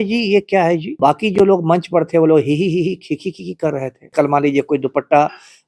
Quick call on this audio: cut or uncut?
cut